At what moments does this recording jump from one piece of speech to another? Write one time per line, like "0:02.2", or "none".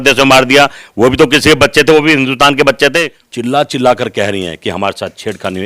0:03.2